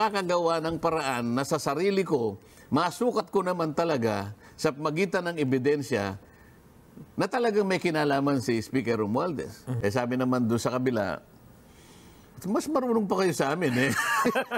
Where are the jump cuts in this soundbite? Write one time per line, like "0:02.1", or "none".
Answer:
0:09.7